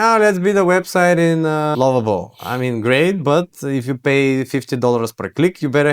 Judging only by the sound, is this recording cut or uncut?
cut